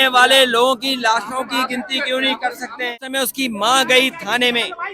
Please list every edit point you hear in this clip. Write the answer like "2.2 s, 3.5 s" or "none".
2.9 s